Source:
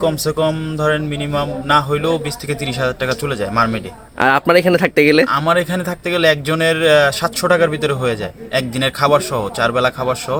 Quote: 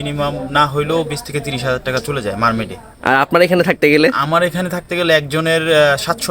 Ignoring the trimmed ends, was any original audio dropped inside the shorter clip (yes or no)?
no